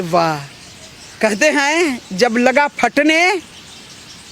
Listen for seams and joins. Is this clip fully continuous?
yes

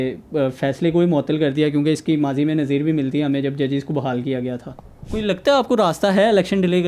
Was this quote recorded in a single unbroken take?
no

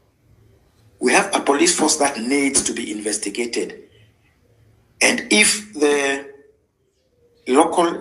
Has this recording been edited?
no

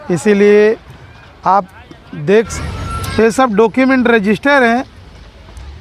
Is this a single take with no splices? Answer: no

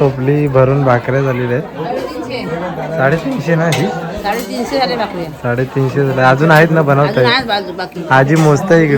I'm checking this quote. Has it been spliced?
no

